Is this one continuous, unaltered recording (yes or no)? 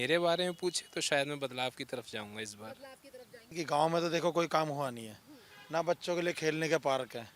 no